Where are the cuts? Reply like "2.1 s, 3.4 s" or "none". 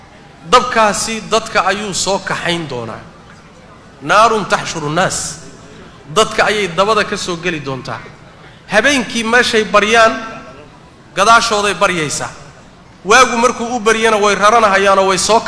none

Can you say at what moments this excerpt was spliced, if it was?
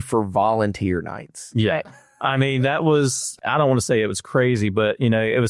3.3 s

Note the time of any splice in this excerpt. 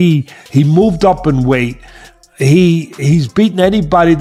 none

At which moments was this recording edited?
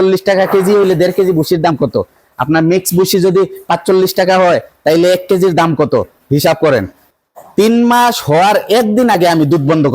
7.0 s

